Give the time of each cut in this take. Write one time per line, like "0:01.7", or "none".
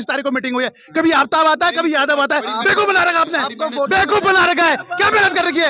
none